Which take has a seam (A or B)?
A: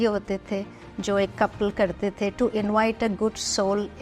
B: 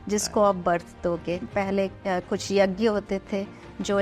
B